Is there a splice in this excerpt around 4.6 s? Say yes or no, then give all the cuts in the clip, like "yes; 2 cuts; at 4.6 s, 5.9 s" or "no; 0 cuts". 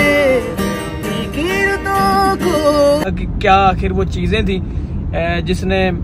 no; 1 cut; at 3.0 s